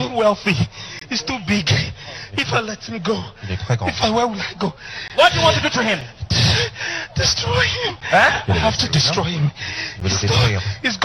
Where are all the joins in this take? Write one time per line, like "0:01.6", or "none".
none